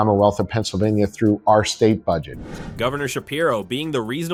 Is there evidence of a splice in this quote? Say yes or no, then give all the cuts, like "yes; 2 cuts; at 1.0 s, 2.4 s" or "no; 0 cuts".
no; 0 cuts